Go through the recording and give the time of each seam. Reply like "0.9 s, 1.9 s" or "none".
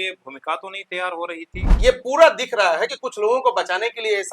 1.7 s